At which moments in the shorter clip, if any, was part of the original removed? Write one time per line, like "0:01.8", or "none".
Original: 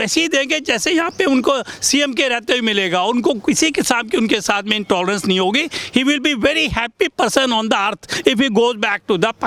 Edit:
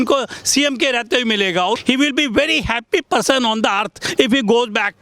0:01.8